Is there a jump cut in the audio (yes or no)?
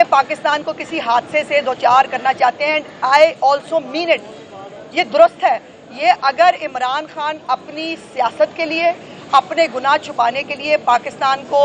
no